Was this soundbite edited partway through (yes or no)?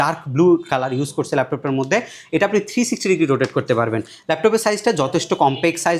no